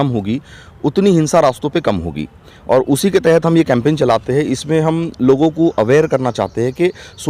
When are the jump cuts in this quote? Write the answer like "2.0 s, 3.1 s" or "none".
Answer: none